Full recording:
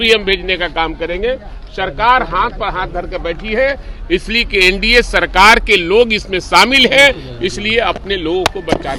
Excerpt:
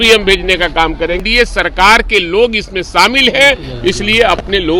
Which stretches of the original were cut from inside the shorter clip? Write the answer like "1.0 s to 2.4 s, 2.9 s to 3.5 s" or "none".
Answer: 1.2 s to 4.8 s